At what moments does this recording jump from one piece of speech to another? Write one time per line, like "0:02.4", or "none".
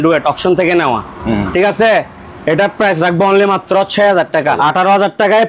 0:04.6